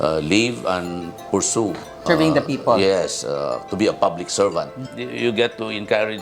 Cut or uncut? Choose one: cut